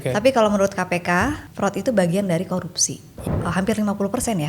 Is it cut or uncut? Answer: cut